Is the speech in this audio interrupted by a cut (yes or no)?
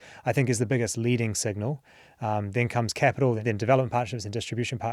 yes